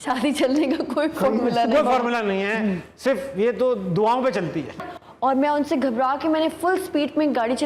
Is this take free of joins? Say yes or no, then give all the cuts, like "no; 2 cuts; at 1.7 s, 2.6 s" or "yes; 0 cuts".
no; 1 cut; at 4.8 s